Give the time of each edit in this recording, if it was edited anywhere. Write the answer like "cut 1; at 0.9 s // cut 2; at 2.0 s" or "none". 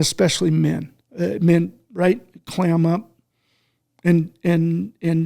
cut 1; at 1.0 s